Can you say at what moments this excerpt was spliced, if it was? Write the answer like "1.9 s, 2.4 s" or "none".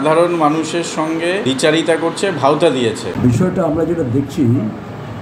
1.4 s, 3.1 s